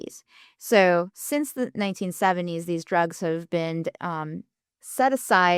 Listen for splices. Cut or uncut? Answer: uncut